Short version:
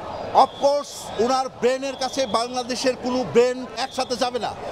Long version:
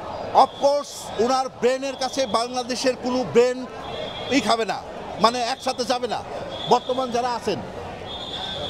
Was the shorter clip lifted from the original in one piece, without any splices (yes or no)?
no